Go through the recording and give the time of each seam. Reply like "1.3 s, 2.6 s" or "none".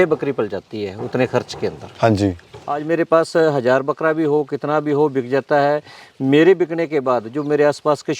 2.5 s